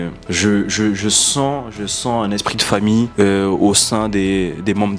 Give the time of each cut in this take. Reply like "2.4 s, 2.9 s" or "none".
none